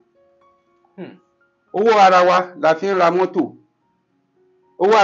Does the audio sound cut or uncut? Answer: uncut